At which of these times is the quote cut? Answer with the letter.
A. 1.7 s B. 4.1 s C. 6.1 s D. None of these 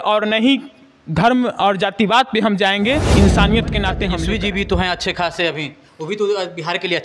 B